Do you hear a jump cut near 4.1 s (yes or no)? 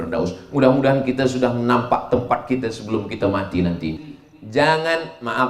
yes